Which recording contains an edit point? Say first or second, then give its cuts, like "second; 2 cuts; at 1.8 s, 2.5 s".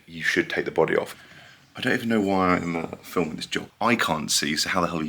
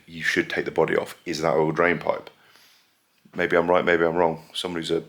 first; 2 cuts; at 1.2 s, 3.6 s